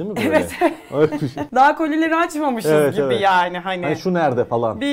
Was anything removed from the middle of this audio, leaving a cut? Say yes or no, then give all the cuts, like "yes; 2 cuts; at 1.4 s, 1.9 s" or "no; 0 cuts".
yes; 1 cut; at 1.4 s